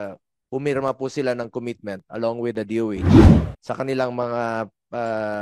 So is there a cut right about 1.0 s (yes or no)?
no